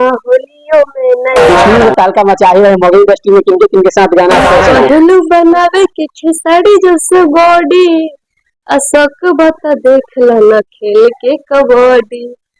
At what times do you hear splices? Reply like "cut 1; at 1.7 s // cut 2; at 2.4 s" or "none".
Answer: cut 1; at 1.6 s // cut 2; at 4.6 s